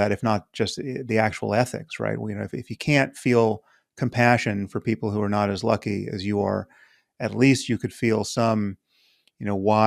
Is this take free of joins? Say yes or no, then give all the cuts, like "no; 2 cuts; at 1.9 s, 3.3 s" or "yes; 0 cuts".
yes; 0 cuts